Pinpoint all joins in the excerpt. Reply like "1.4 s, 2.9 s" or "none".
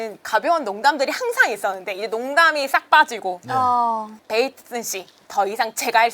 4.2 s